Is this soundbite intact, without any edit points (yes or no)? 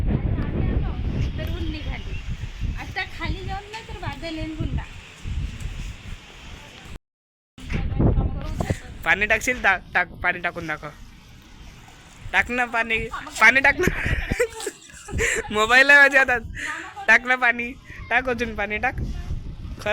no